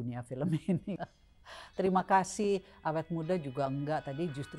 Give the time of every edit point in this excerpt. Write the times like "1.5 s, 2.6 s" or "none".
1.0 s